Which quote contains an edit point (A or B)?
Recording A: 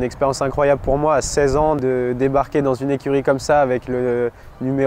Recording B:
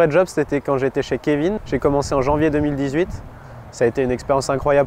B